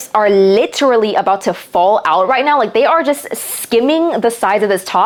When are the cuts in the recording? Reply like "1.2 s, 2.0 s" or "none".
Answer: none